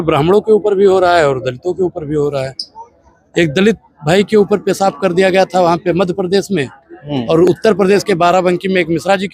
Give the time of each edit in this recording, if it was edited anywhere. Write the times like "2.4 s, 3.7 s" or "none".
none